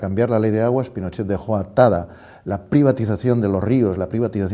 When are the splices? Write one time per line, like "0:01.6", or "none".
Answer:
0:02.6